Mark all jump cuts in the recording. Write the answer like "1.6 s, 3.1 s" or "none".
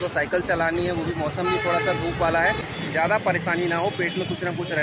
2.6 s